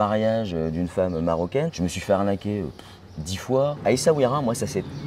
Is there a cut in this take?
yes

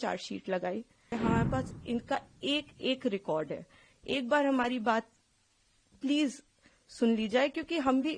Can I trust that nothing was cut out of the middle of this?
no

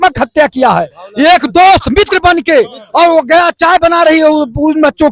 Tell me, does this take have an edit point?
no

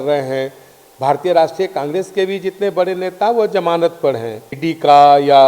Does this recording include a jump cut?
yes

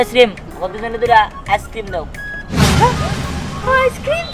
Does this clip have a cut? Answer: no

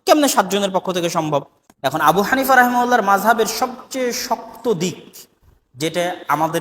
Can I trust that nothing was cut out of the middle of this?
no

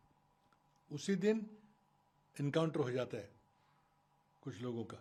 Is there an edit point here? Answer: no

